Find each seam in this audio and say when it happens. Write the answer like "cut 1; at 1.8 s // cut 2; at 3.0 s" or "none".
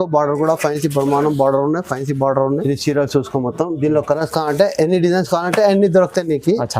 cut 1; at 2.6 s

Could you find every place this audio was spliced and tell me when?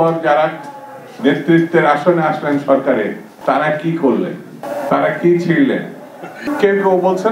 cut 1; at 3.3 s // cut 2; at 4.6 s // cut 3; at 6.4 s

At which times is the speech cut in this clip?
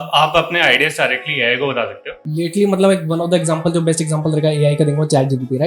cut 1; at 2.2 s

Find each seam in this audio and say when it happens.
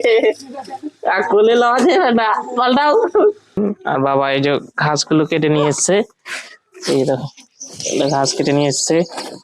cut 1; at 3.6 s

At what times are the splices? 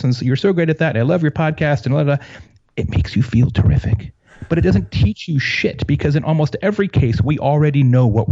none

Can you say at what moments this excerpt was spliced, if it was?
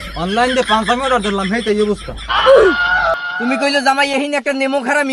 cut 1; at 3.1 s

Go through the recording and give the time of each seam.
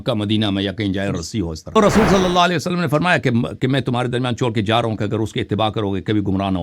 cut 1; at 1.8 s

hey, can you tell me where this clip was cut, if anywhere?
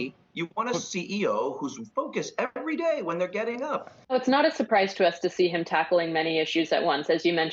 cut 1; at 3.9 s

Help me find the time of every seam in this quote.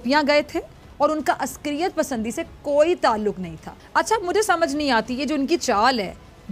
cut 1; at 3.6 s

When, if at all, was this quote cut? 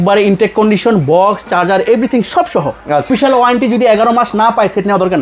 cut 1; at 3.1 s

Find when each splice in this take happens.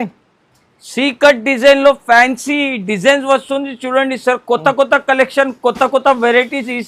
none

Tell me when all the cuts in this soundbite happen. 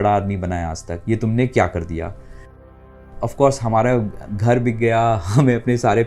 cut 1; at 2.9 s

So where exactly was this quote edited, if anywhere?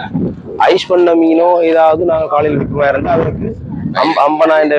none

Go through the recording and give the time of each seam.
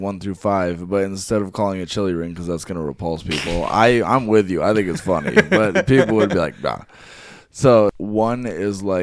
cut 1; at 7.9 s

